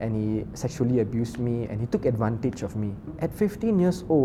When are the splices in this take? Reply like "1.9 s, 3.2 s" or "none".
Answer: 3.1 s